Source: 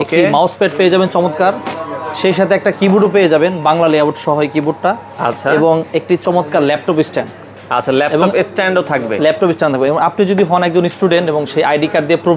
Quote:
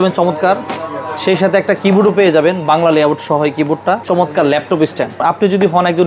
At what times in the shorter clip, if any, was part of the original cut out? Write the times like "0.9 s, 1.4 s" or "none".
4.0 s, 5.2 s